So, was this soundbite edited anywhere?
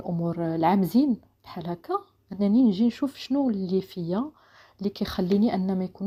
no; 0 cuts

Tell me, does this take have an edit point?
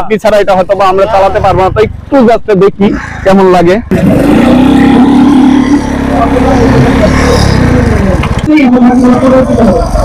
yes; 2 cuts; at 3.9 s, 8.5 s

